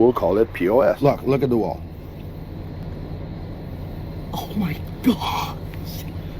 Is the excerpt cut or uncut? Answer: cut